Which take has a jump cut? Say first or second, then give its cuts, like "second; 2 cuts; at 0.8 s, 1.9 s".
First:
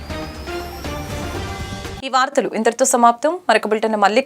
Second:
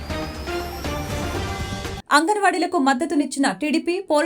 second; 1 cut; at 1.9 s